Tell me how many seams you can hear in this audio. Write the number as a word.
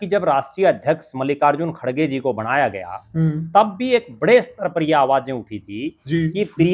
zero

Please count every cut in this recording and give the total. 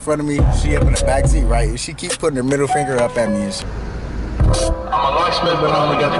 one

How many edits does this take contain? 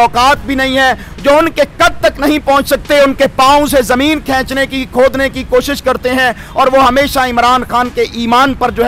zero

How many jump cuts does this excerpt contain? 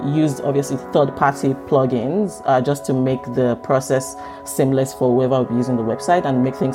zero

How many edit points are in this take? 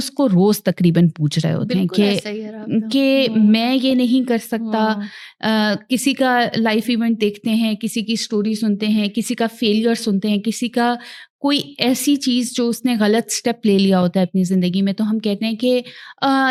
zero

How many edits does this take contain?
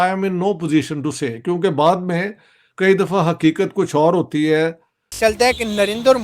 one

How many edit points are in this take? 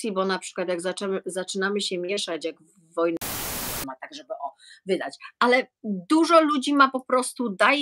one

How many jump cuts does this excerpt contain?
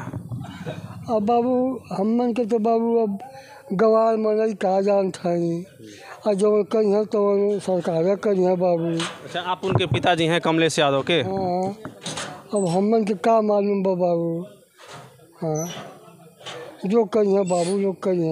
zero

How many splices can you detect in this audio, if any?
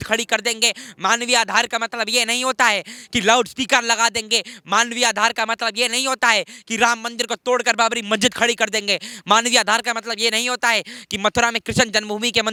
zero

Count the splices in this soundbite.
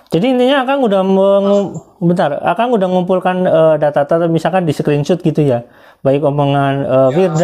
zero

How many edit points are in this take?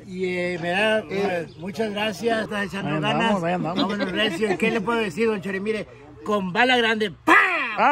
one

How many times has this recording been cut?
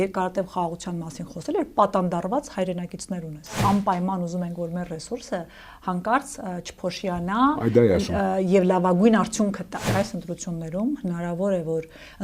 two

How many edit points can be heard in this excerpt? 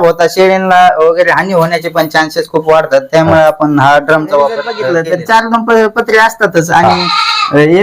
one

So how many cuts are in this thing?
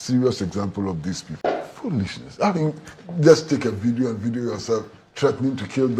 one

